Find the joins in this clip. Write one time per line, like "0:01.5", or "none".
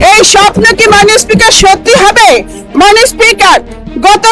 none